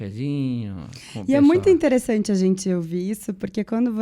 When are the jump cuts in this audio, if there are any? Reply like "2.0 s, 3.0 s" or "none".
none

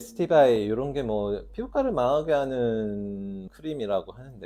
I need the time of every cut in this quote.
none

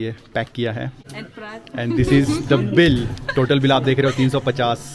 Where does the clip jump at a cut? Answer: 1.0 s

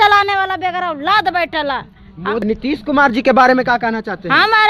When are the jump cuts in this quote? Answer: 2.4 s

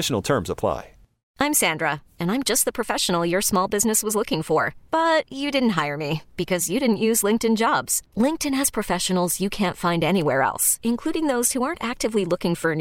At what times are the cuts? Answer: 1.4 s

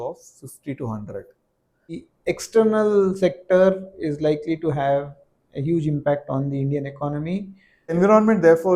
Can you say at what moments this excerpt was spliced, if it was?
2.1 s, 8.0 s

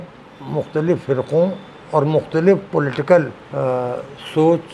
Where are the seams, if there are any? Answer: 3.4 s

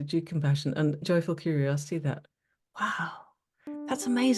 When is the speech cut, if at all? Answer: 1.1 s

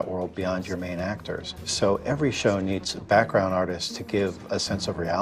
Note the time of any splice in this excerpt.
1.2 s

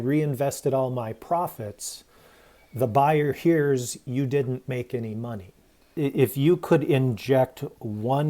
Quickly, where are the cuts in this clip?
5.8 s

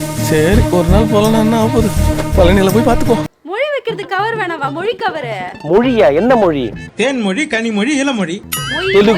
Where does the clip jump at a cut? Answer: 3.2 s

